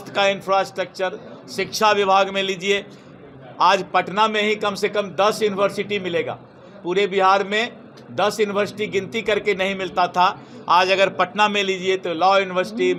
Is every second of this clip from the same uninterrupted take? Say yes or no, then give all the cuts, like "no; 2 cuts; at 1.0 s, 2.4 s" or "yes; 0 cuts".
yes; 0 cuts